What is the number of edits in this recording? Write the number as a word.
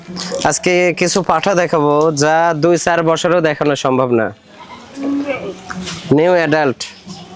zero